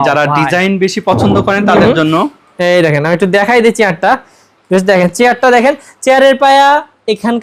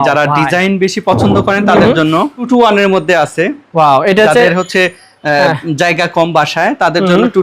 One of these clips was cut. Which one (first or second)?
second